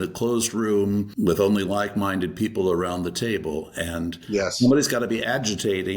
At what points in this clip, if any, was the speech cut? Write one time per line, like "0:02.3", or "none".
0:01.1